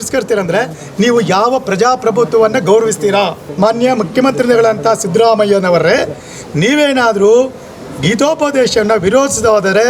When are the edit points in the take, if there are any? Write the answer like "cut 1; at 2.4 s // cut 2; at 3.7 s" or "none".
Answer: cut 1; at 3.4 s